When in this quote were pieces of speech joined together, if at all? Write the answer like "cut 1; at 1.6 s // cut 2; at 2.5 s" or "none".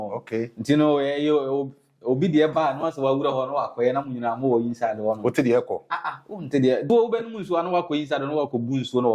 cut 1; at 6.9 s